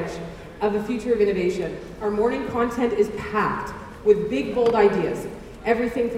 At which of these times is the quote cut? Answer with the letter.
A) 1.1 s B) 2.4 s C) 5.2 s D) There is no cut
D